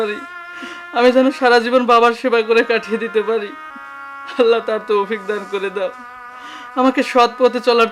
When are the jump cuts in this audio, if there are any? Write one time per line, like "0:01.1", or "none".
none

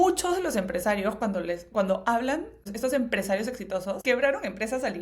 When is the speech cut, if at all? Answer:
0:02.7
0:04.0

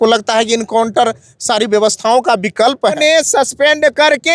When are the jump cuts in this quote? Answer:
0:03.0

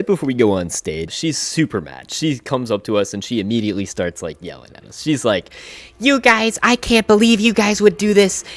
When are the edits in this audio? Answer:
0:01.1

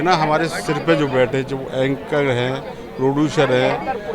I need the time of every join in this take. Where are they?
none

